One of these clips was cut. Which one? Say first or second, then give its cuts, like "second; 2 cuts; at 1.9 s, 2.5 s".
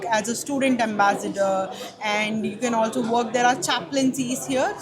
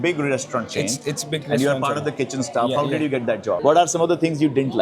second; 1 cut; at 3.6 s